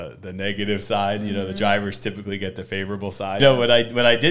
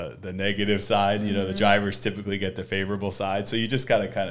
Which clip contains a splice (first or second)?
first